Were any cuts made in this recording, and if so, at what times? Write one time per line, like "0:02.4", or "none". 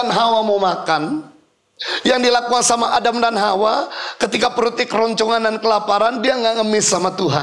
none